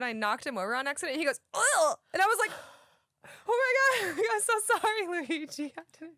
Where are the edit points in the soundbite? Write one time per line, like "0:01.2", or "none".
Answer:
none

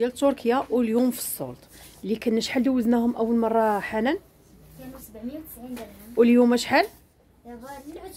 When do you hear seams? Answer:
none

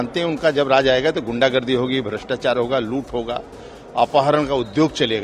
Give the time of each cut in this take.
none

